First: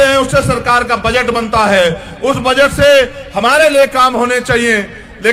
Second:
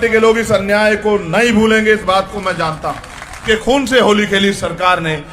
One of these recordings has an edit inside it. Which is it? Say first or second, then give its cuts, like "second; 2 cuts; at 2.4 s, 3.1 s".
second; 1 cut; at 3.4 s